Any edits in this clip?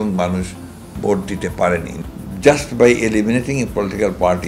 yes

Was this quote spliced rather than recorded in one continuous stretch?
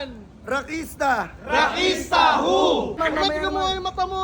yes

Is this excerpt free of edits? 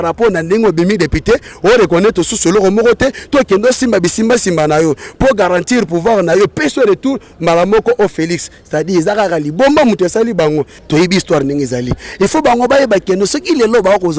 no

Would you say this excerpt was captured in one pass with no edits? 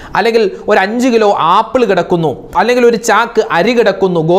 yes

